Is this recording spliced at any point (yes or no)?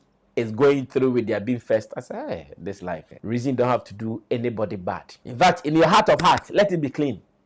yes